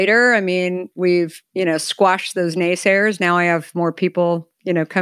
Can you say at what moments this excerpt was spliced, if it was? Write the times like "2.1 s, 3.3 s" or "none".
1.4 s